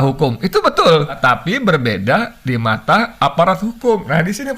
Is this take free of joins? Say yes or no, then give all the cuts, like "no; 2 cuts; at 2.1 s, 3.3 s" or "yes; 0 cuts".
no; 1 cut; at 1.2 s